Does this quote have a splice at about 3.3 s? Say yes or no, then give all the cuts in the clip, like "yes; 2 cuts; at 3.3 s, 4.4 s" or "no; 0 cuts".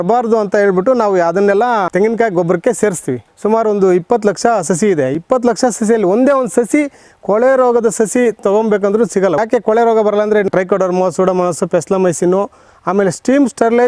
yes; 4 cuts; at 1.9 s, 3.3 s, 9.4 s, 10.5 s